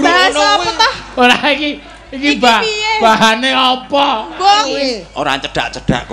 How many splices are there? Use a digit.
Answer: 1